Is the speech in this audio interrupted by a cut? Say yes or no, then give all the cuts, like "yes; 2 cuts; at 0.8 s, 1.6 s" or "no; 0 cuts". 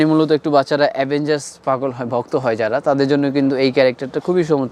no; 0 cuts